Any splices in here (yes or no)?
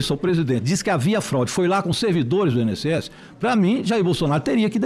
no